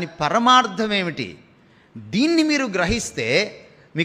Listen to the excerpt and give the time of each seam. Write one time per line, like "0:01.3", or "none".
none